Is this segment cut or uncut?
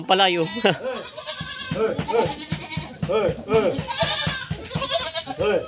cut